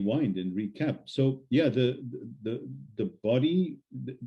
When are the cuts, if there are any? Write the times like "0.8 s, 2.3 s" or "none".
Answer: none